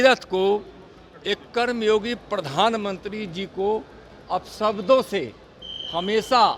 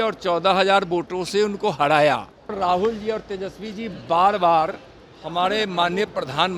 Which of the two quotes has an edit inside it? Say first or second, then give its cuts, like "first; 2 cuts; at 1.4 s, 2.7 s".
second; 1 cut; at 2.5 s